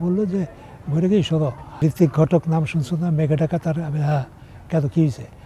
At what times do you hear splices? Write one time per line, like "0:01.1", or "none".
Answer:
0:01.7